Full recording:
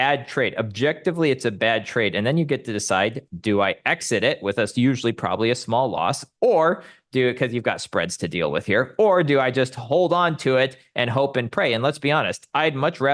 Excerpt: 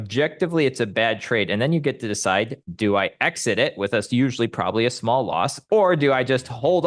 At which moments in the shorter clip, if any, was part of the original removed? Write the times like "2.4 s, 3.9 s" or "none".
5.6 s